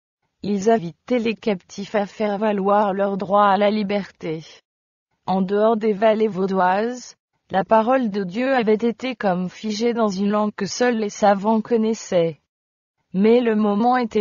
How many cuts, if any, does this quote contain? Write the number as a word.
one